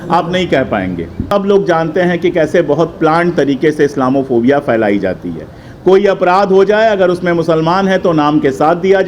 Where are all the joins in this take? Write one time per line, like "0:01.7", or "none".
0:01.3